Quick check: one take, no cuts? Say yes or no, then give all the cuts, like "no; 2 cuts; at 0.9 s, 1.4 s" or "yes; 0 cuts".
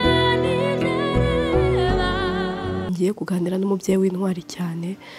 no; 1 cut; at 2.8 s